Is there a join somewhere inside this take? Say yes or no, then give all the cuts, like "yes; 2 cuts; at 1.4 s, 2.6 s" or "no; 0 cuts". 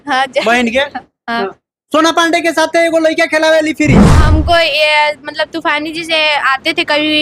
yes; 1 cut; at 4.2 s